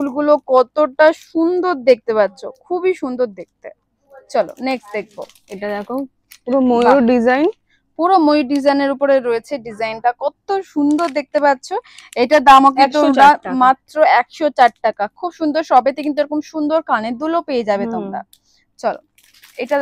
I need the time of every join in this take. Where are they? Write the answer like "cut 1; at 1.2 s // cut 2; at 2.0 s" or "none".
none